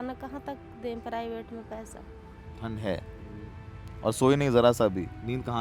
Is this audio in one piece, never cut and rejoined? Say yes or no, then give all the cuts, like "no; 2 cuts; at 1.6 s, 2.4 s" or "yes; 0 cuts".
no; 1 cut; at 2.5 s